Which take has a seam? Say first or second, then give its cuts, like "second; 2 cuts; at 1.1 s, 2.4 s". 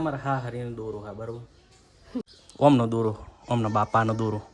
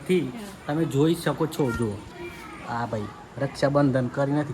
first; 1 cut; at 2.3 s